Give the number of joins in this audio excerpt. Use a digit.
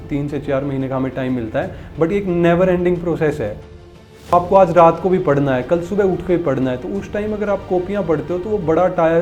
1